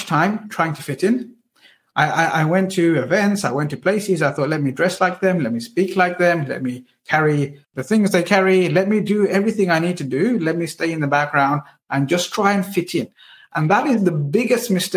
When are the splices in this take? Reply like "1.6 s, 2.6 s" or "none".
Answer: none